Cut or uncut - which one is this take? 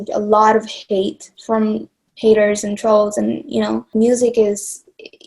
cut